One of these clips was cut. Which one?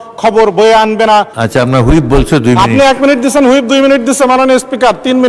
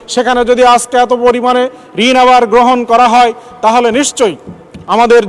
first; 1 cut; at 1.4 s

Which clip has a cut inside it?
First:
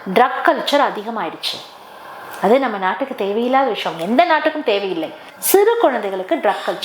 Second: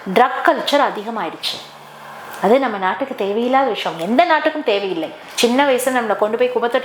second; 1 cut; at 5.2 s

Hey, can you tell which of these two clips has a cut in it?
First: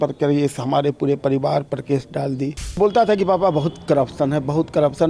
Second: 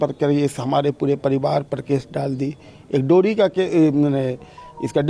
first; 1 cut; at 2.8 s

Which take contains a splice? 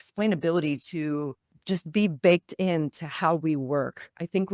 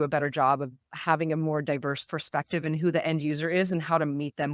first; 1 cut; at 1.5 s

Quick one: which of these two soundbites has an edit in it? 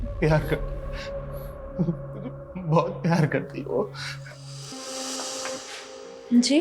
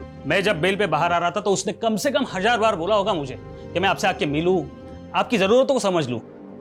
first; 1 cut; at 4.8 s

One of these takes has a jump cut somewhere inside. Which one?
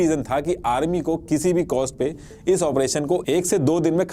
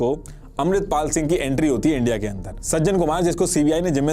second; 1 cut; at 2.5 s

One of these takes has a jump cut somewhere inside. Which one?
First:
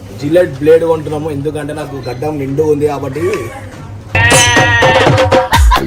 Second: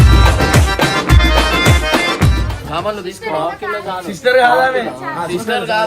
second; 1 cut; at 2.6 s

